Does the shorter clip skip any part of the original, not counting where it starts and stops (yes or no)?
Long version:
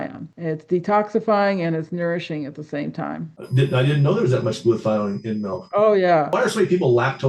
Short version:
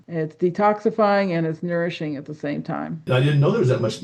yes